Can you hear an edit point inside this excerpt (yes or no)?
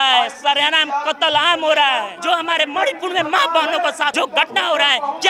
yes